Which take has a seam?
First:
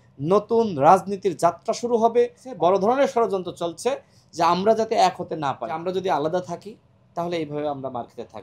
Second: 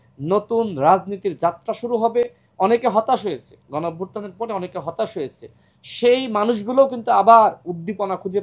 first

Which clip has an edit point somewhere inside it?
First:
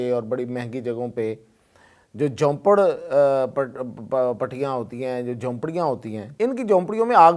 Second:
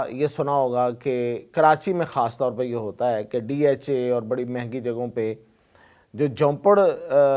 first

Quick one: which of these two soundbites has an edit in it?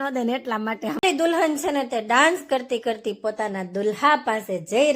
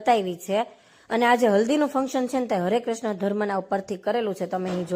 first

